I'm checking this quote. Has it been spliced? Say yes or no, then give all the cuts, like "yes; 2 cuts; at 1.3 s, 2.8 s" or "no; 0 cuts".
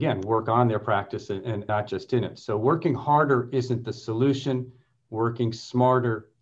yes; 1 cut; at 1.6 s